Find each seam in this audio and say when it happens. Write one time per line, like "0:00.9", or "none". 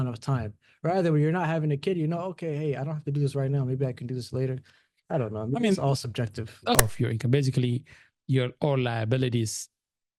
0:06.8

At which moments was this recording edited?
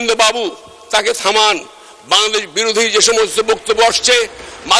none

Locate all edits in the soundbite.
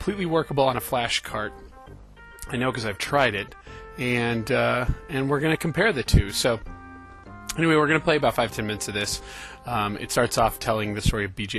0:08.1

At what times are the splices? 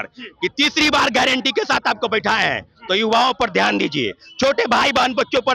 none

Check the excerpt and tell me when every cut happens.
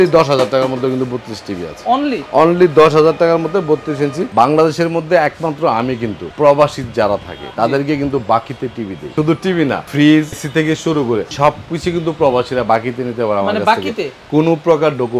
0:04.2
0:06.2
0:07.4
0:09.0
0:10.9

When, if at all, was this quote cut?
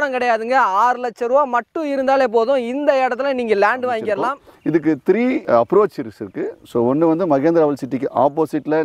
0:04.4
0:05.4

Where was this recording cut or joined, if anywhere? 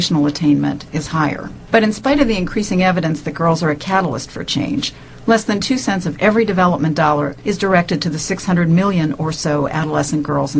0:02.0

